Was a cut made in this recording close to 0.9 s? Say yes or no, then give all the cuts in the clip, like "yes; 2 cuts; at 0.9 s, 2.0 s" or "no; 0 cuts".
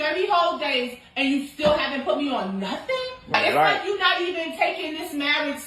yes; 2 cuts; at 0.9 s, 3.3 s